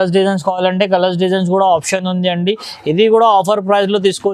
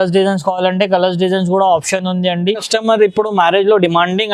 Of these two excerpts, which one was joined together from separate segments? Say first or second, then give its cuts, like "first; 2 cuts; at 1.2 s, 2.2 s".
second; 1 cut; at 2.7 s